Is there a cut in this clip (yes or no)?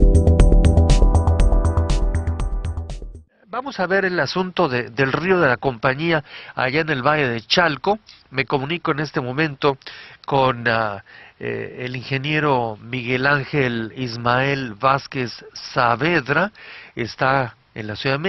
no